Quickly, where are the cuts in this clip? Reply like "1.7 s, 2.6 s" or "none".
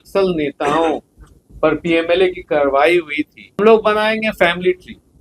3.6 s